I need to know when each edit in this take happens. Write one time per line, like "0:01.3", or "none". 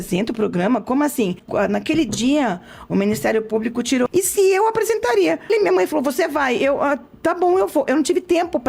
0:01.4
0:04.1
0:05.5